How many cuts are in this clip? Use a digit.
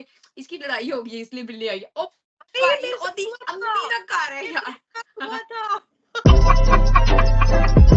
0